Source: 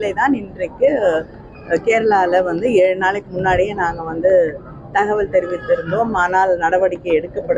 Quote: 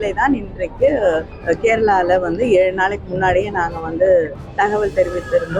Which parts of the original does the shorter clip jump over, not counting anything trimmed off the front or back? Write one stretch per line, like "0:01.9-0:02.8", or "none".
0:01.3-0:01.6
0:04.6-0:04.8